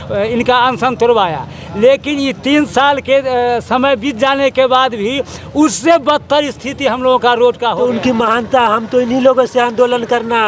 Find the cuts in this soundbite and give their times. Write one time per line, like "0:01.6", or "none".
0:07.8